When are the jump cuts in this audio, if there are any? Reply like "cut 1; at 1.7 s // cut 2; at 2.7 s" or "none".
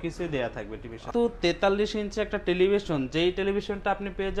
cut 1; at 1.1 s